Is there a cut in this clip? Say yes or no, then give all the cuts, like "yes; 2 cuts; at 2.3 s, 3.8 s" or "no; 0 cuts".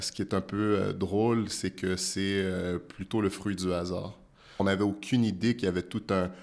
yes; 1 cut; at 4.6 s